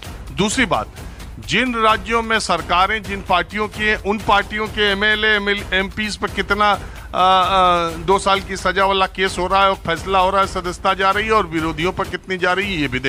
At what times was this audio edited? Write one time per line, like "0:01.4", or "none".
none